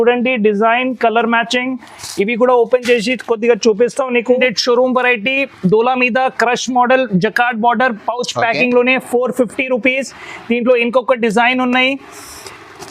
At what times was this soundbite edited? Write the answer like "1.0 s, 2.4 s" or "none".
4.4 s